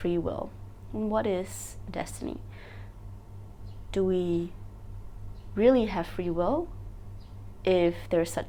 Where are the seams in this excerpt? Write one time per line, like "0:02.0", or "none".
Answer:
none